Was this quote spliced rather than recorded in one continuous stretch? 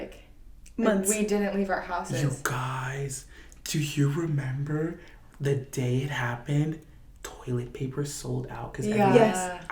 no; 0 cuts

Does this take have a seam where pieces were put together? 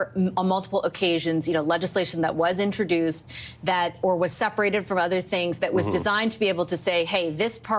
no; 0 cuts

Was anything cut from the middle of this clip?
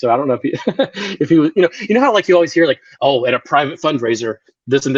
no; 0 cuts

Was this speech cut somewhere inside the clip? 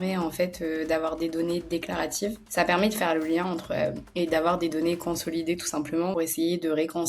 yes; 2 cuts; at 2.4 s, 6.1 s

